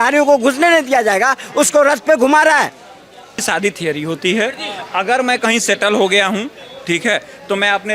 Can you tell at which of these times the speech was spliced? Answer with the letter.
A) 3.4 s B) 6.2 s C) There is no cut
A